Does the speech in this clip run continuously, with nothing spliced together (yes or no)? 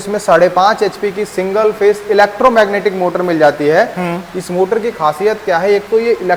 yes